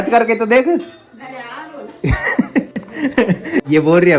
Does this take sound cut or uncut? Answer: uncut